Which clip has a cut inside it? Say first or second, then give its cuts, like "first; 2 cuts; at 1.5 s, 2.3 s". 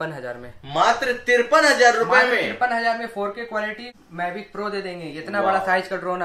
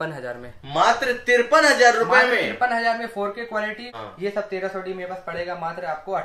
second; 1 cut; at 4.0 s